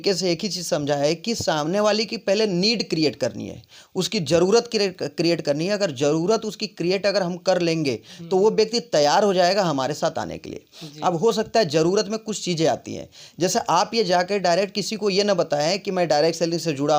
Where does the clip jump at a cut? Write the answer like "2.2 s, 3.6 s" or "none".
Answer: none